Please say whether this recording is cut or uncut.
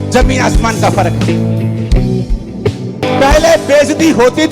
cut